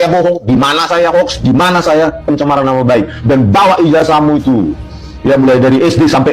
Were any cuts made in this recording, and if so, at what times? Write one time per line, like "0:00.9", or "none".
none